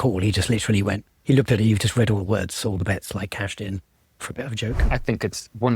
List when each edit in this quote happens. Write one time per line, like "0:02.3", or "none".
0:04.8